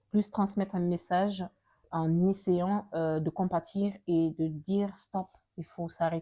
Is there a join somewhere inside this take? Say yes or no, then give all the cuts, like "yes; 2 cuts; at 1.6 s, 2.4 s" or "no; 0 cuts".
no; 0 cuts